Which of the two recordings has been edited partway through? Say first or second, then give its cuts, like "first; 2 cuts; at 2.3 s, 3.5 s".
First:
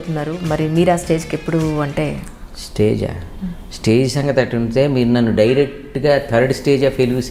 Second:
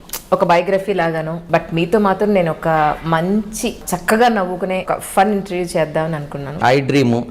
second; 4 cuts; at 1.4 s, 3.9 s, 4.9 s, 6.6 s